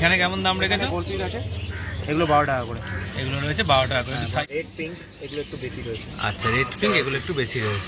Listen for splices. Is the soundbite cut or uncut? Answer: cut